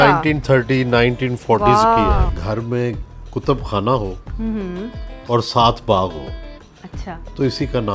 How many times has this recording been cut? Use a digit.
1